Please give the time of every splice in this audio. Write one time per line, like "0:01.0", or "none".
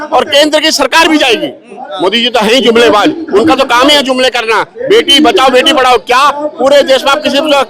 0:01.8